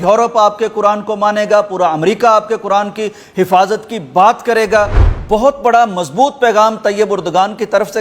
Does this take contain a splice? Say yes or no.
yes